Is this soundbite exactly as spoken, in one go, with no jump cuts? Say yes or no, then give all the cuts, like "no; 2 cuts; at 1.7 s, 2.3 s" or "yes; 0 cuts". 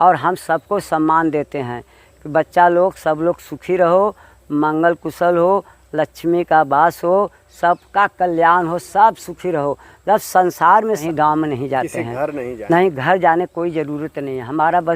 no; 1 cut; at 11.0 s